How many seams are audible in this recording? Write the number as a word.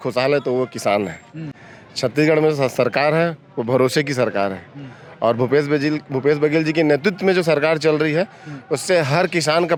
zero